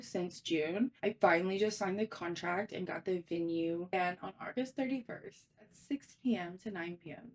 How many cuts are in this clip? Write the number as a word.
two